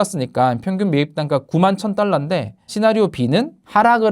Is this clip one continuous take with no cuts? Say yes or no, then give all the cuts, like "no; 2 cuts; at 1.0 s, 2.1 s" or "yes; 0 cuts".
no; 1 cut; at 2.6 s